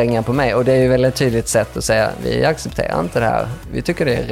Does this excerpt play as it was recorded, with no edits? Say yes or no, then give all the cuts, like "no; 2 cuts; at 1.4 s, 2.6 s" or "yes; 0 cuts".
yes; 0 cuts